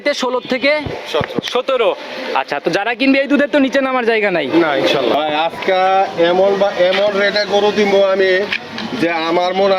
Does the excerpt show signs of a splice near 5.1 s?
yes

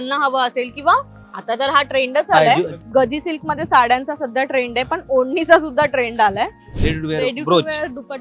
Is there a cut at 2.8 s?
yes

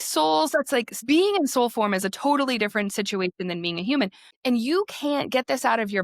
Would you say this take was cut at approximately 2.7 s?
no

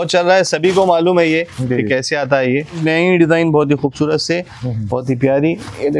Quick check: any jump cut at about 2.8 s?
yes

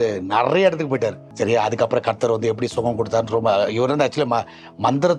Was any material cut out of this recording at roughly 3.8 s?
no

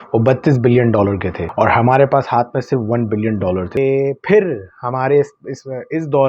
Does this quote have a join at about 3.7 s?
yes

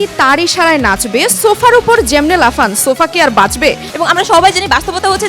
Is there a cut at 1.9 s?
no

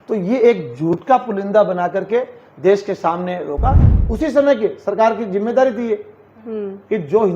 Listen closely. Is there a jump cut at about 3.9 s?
yes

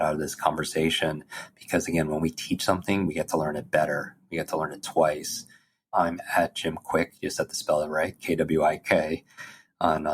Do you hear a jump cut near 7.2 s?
no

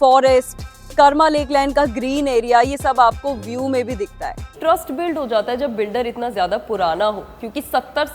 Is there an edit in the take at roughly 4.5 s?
yes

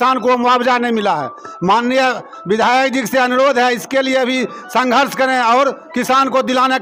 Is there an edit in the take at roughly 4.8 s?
no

